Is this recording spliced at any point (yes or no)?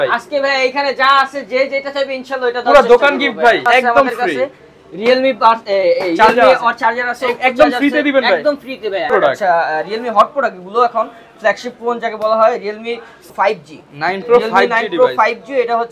yes